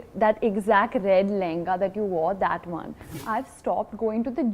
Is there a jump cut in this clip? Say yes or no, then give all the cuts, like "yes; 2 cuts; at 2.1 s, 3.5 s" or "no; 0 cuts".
yes; 1 cut; at 3.2 s